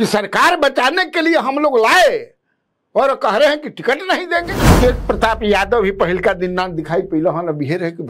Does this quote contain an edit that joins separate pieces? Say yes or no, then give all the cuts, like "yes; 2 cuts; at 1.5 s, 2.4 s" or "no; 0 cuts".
yes; 1 cut; at 4.7 s